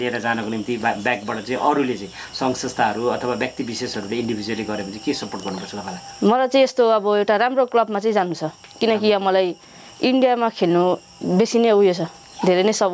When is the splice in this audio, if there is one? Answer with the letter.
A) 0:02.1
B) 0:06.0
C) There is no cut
C